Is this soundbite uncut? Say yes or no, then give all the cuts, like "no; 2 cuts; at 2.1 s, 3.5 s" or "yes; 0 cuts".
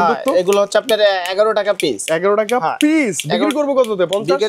yes; 0 cuts